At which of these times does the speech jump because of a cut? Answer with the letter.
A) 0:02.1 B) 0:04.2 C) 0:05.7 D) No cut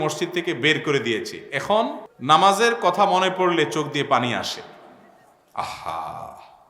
A